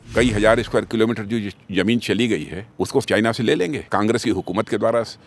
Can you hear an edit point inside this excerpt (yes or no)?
yes